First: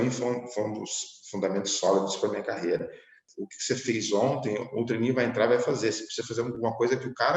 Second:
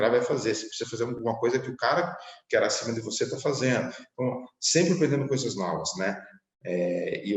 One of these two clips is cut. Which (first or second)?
first